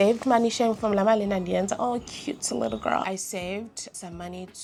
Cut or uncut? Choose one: uncut